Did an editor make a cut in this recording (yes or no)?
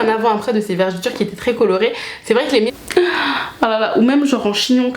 yes